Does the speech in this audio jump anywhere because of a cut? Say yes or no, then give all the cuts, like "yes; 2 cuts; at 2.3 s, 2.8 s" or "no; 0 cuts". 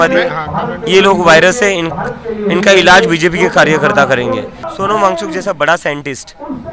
yes; 1 cut; at 4.6 s